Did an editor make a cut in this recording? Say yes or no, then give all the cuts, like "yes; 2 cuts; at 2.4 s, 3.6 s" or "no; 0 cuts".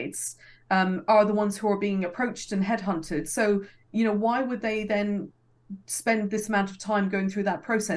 no; 0 cuts